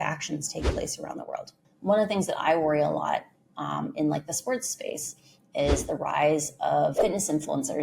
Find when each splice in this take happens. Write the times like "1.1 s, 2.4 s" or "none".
1.7 s, 7.0 s